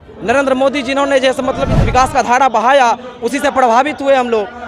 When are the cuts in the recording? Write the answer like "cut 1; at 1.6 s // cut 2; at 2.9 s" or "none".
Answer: cut 1; at 1.8 s